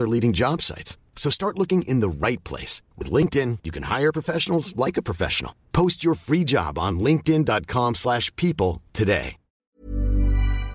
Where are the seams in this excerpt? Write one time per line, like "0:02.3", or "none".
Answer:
0:09.6